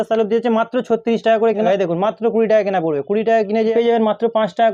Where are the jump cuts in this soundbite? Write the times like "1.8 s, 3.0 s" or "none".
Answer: 1.7 s, 3.7 s